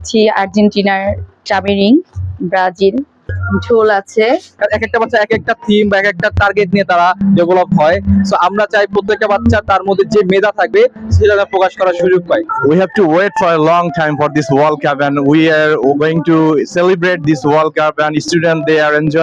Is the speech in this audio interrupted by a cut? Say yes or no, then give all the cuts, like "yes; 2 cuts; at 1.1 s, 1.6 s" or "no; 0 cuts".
yes; 4 cuts; at 1.4 s, 3.2 s, 4.5 s, 12.5 s